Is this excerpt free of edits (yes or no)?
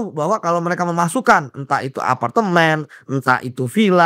yes